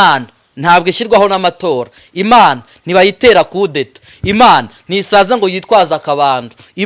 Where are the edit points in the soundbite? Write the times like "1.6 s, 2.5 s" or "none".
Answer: none